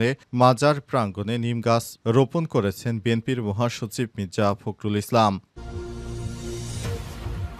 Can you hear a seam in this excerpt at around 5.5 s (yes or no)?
yes